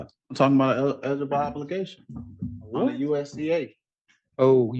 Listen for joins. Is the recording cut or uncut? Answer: uncut